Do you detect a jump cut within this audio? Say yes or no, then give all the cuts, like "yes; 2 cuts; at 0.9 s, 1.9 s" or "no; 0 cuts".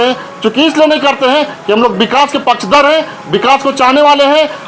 no; 0 cuts